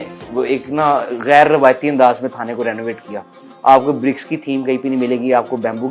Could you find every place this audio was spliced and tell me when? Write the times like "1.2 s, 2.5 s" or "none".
none